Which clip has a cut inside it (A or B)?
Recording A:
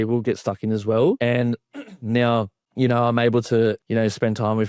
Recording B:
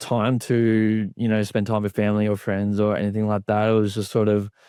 A